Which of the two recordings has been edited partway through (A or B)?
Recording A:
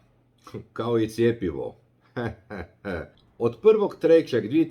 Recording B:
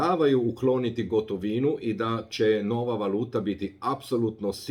A